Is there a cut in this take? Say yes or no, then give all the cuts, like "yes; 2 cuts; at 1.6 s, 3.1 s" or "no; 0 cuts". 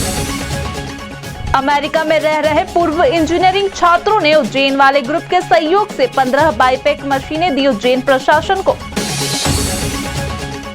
yes; 1 cut; at 1.3 s